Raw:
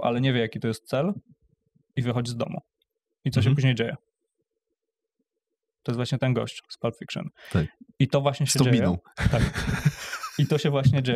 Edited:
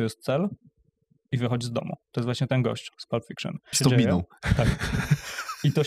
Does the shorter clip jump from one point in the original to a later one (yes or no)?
yes